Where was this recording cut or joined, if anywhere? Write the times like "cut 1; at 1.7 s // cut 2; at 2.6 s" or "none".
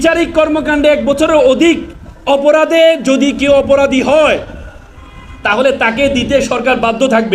none